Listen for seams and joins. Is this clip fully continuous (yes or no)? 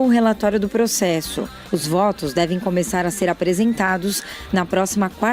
no